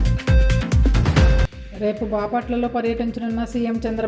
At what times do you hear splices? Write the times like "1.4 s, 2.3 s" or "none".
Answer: 1.1 s